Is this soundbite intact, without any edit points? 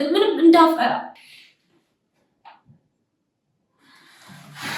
no; 1 cut; at 1.2 s

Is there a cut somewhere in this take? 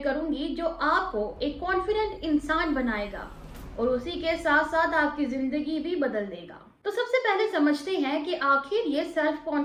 no; 0 cuts

